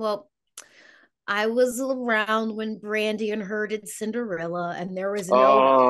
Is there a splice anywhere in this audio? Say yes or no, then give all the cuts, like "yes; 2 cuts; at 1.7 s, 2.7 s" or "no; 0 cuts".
no; 0 cuts